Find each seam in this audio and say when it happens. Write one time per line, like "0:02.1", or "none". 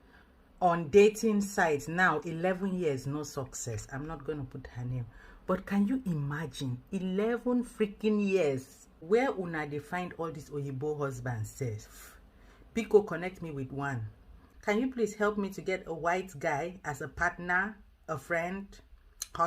0:09.0
0:14.5